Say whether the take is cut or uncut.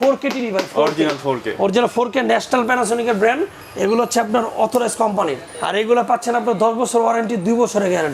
uncut